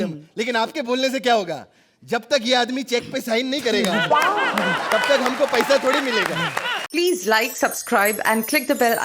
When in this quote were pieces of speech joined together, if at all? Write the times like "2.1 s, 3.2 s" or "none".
6.8 s